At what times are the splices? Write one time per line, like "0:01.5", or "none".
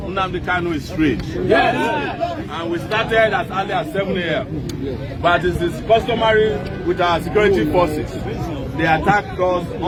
none